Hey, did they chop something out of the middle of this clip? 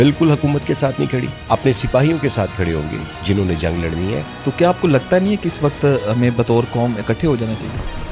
yes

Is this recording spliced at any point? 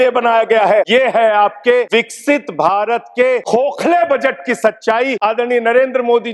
yes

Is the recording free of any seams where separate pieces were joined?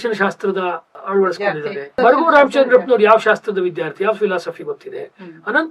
no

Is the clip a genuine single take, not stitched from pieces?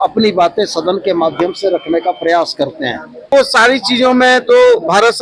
no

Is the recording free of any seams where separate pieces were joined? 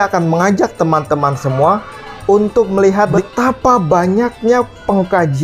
no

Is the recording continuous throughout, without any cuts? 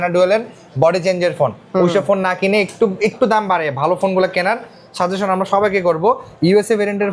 yes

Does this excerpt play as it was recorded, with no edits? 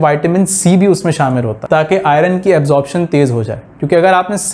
no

